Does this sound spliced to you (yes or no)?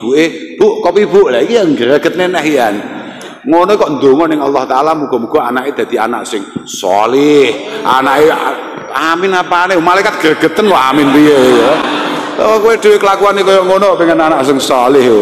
no